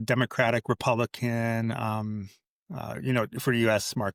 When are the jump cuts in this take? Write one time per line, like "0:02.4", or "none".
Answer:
none